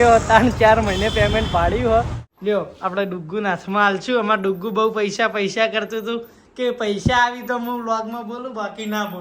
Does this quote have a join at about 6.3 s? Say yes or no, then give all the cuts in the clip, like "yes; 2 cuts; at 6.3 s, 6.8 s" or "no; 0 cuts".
no; 1 cut; at 2.2 s